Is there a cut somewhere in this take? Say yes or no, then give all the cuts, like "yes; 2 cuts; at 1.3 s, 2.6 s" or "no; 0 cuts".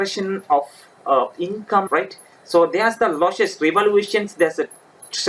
yes; 1 cut; at 1.9 s